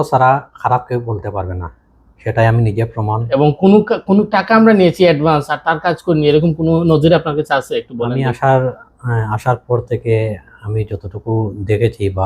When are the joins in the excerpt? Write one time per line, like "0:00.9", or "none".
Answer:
0:03.2